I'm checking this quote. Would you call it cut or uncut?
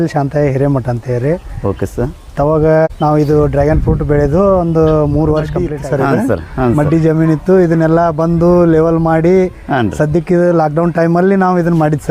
cut